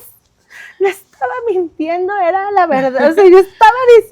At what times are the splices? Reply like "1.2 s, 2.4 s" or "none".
none